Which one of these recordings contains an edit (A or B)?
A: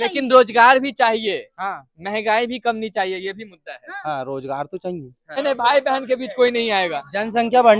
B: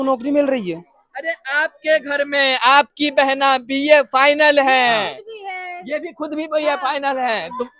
A